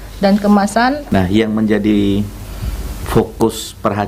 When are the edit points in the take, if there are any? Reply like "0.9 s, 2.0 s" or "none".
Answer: 1.0 s